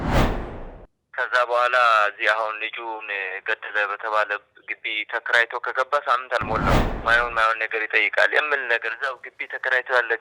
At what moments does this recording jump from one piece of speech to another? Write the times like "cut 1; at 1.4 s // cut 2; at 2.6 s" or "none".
cut 1; at 6.9 s

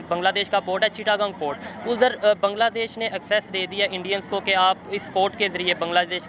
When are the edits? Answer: none

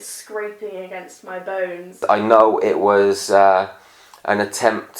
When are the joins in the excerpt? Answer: cut 1; at 2.0 s

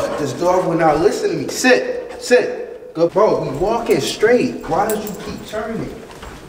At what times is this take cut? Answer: cut 1; at 3.1 s

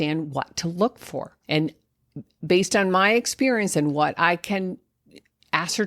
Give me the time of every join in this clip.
cut 1; at 1.4 s

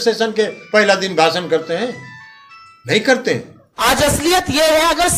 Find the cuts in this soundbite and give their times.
none

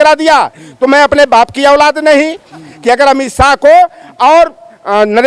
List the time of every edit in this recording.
cut 1; at 2.7 s

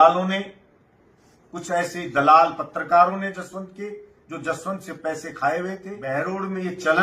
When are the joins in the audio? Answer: cut 1; at 6.1 s

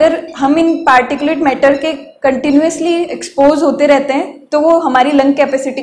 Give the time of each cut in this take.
none

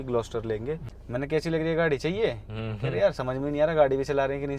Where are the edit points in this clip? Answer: cut 1; at 0.9 s

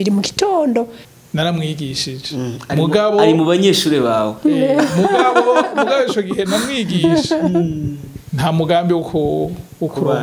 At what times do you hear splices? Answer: cut 1; at 1.0 s

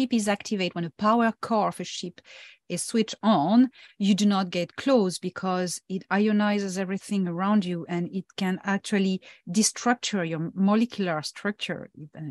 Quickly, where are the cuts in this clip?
none

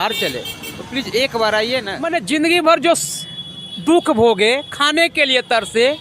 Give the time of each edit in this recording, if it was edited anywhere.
cut 1; at 2.0 s

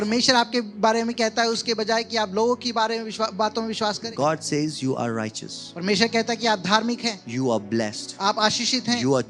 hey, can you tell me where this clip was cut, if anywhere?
cut 1; at 4.1 s

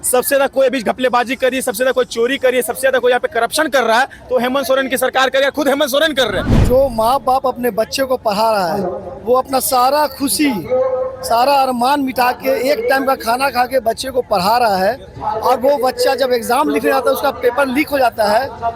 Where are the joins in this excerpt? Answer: cut 1; at 6.6 s

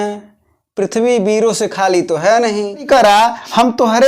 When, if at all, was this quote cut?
cut 1; at 2.9 s

